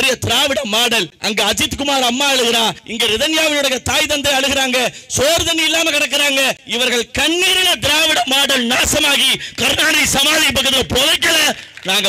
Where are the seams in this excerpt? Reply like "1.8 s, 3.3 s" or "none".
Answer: 1.1 s, 2.8 s, 6.6 s